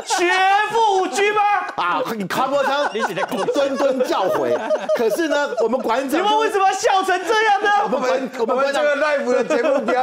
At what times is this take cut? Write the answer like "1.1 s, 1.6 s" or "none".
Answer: none